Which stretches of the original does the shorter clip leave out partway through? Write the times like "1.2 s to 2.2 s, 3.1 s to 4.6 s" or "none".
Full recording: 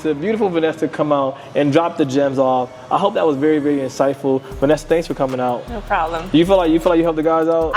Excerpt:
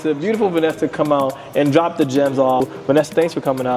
2.7 s to 4.5 s